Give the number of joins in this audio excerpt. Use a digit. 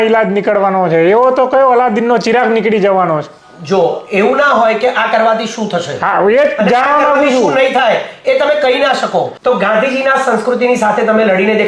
1